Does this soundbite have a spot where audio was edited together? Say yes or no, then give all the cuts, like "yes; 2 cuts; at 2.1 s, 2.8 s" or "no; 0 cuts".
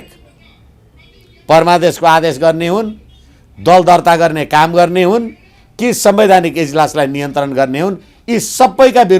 no; 0 cuts